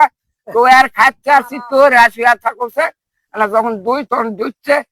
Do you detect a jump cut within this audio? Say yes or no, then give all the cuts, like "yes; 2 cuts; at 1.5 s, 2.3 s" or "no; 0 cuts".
no; 0 cuts